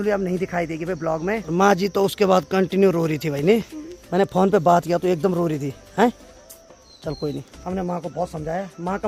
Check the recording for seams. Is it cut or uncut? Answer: uncut